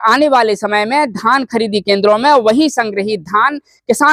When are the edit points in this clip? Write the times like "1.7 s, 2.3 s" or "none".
none